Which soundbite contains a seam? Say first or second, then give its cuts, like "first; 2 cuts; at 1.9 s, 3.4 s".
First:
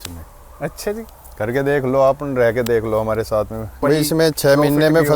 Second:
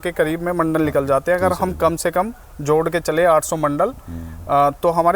first; 1 cut; at 3.8 s